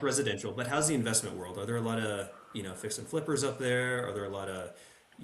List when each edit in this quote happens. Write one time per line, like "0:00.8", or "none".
none